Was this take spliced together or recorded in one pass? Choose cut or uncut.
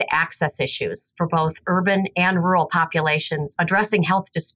cut